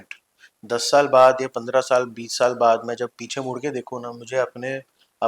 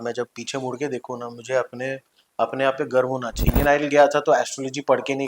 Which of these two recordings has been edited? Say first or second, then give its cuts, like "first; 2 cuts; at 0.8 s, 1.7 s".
second; 1 cut; at 3.4 s